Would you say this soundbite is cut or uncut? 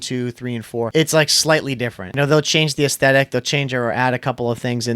cut